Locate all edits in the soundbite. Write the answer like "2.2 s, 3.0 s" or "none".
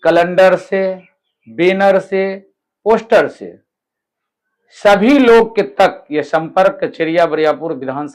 none